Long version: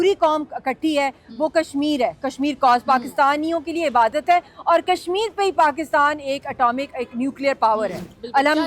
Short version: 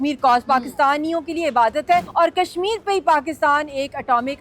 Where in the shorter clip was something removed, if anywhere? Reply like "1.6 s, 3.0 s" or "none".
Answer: 2.1 s